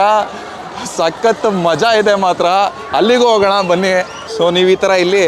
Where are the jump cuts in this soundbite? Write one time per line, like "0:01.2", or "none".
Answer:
0:04.3